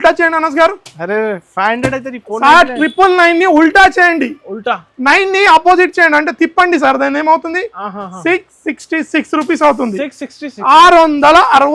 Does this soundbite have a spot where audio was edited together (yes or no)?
no